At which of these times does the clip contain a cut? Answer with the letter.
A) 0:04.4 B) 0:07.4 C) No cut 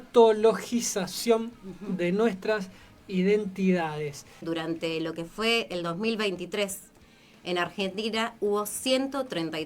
A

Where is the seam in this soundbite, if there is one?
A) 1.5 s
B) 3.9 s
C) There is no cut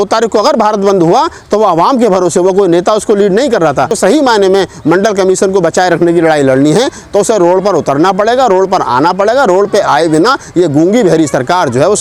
B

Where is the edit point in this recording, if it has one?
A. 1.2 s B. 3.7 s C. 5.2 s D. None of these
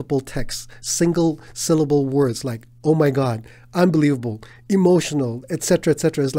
D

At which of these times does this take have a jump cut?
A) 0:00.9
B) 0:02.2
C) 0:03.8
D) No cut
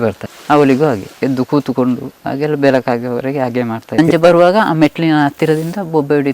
C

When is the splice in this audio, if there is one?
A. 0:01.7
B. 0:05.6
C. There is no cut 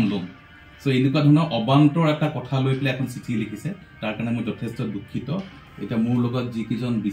B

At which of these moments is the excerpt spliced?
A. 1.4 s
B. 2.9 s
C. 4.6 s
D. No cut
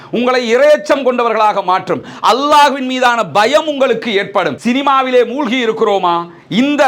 C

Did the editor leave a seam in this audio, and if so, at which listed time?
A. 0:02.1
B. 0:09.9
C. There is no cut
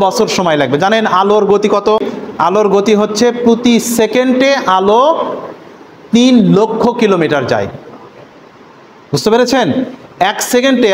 A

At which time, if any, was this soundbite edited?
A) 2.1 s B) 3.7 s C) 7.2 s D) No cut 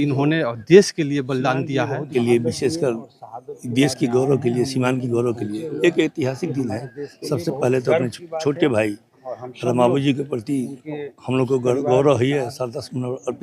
A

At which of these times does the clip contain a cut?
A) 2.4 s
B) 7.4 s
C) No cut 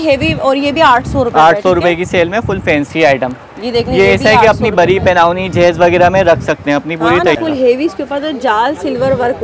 B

